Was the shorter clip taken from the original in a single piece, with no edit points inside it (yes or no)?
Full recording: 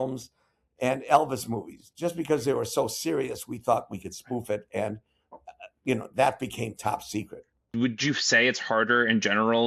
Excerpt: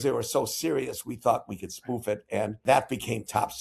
no